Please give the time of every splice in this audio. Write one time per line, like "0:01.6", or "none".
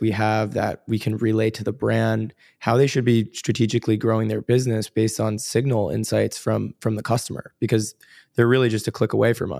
none